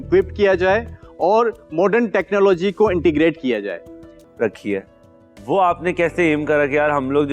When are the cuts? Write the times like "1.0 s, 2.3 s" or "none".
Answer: 4.1 s